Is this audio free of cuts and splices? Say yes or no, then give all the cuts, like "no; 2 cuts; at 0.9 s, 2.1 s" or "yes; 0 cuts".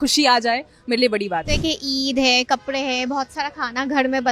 no; 1 cut; at 1.5 s